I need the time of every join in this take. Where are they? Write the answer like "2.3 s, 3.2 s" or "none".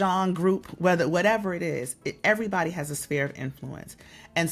none